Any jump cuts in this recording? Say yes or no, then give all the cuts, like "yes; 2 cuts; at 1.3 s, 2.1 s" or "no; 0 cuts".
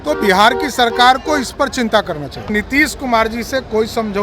yes; 1 cut; at 2.5 s